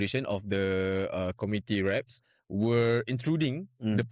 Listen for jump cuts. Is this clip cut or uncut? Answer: uncut